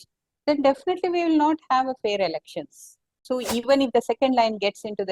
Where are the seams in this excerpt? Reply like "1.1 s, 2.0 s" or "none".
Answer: 3.2 s